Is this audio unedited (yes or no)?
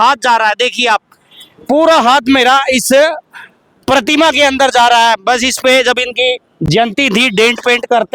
yes